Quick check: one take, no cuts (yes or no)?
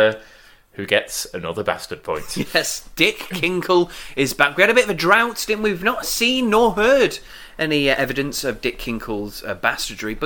yes